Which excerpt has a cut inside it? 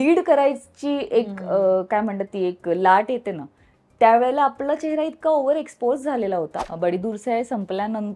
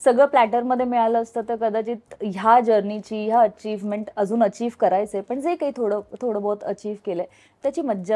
first; 1 cut; at 6.6 s

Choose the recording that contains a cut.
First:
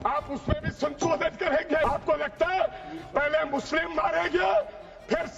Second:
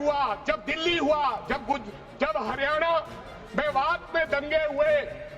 first; 1 cut; at 1.8 s

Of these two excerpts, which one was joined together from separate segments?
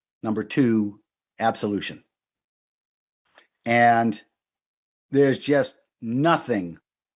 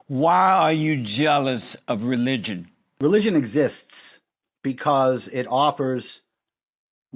second; 1 cut; at 2.9 s

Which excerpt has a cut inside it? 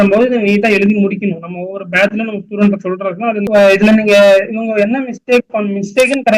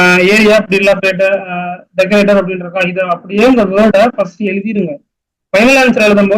first; 1 cut; at 3.4 s

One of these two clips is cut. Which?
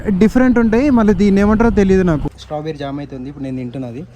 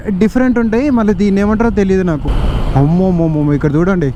first; 1 cut; at 2.3 s

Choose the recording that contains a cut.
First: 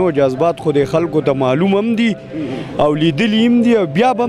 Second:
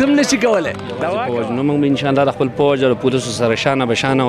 second; 1 cut; at 1.2 s

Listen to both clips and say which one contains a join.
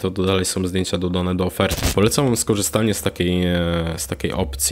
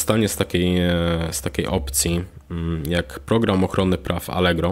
first; 1 cut; at 1.8 s

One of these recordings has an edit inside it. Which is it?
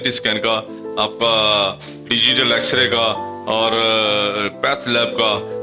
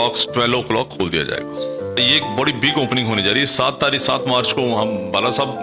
second; 1 cut; at 2.0 s

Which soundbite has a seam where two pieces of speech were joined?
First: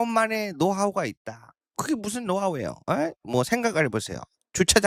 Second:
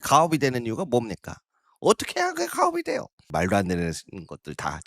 second; 1 cut; at 3.2 s

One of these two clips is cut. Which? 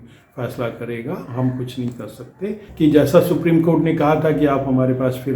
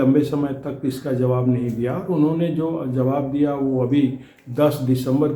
first; 1 cut; at 2.7 s

